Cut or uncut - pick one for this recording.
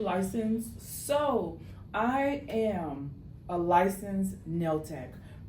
uncut